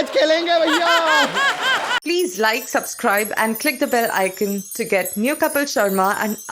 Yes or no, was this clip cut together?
yes